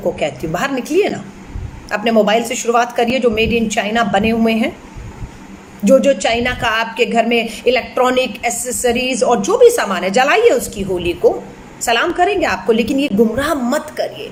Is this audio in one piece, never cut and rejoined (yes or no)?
yes